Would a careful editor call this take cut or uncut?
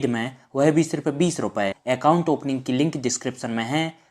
cut